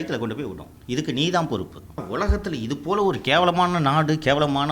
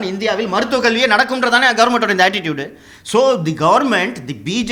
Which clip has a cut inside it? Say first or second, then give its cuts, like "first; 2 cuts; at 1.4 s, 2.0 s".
first; 1 cut; at 2.0 s